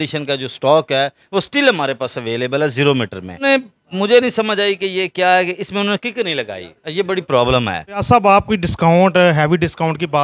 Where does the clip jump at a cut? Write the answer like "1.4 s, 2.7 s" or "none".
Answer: 3.4 s, 8.0 s